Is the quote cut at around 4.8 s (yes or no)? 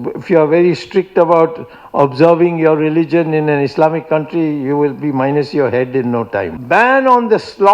no